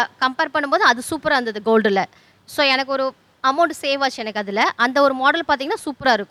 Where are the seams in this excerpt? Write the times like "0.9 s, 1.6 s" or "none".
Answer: none